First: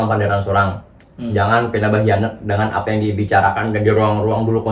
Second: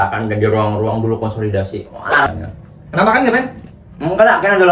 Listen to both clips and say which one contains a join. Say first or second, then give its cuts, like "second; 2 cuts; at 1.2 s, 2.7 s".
second; 1 cut; at 2.3 s